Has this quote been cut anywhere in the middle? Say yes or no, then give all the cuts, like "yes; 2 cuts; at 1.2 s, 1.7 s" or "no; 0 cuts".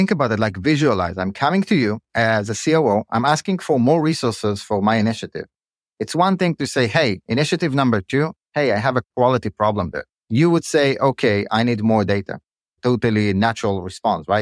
yes; 2 cuts; at 9.1 s, 10.2 s